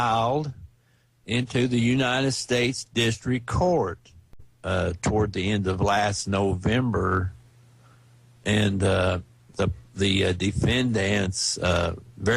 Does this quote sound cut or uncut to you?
cut